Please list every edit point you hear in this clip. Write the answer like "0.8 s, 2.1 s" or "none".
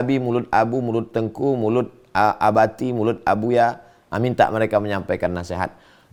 none

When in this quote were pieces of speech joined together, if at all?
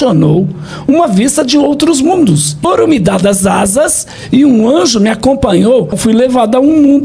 2.5 s, 6.0 s

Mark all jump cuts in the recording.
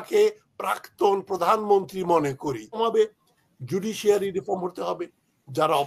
2.8 s

